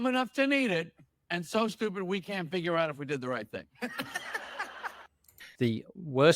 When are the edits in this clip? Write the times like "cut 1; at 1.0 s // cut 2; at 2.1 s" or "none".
cut 1; at 5.5 s